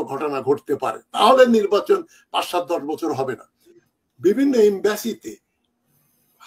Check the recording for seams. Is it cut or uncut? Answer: cut